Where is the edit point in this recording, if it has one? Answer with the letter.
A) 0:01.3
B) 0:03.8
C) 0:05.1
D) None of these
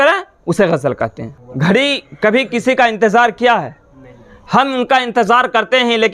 A